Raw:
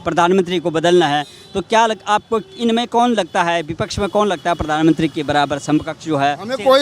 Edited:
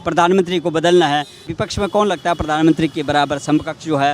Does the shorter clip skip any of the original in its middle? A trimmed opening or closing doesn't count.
yes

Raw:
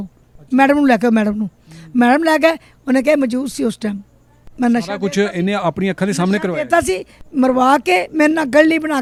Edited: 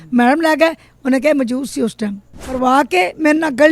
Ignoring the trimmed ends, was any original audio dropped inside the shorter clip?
yes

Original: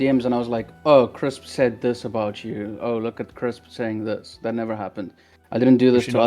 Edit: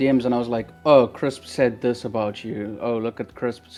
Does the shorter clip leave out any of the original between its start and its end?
no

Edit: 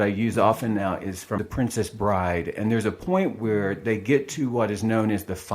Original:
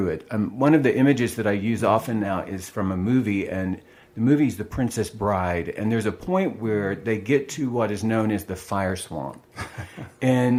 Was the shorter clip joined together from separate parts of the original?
yes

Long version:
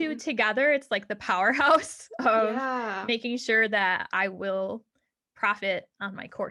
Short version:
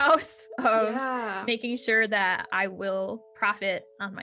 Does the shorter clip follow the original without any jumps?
no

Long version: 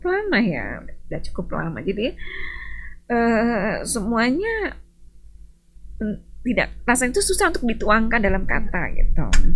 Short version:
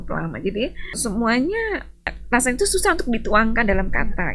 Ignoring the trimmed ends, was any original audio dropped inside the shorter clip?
yes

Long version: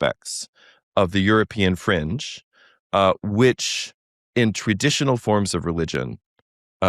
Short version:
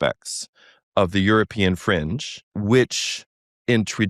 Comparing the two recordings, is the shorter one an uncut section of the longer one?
no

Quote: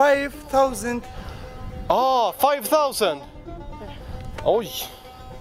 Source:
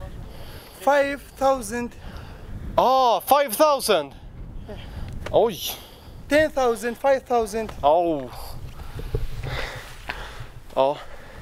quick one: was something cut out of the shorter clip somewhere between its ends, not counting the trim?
no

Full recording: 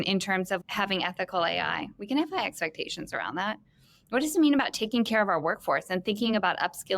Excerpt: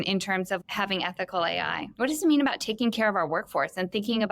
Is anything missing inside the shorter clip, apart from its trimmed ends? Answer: yes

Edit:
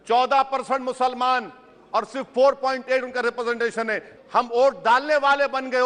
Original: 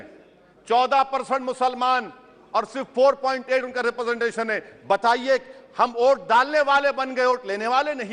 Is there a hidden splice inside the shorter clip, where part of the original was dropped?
yes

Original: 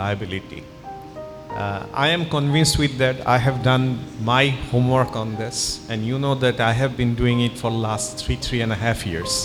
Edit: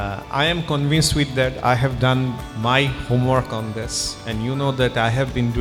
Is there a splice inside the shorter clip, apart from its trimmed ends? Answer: no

